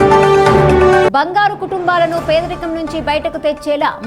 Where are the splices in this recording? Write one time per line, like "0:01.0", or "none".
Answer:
0:01.0